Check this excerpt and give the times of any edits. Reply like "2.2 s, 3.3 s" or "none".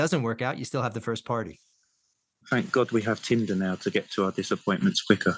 none